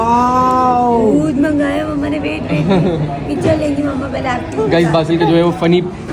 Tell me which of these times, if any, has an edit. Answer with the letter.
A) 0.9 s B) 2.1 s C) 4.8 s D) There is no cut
D